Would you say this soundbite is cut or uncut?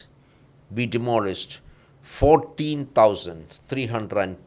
uncut